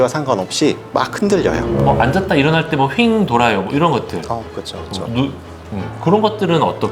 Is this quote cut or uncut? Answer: cut